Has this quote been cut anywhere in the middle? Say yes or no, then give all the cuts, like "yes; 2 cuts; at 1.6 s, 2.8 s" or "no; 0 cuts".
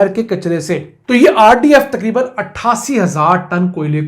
yes; 1 cut; at 0.9 s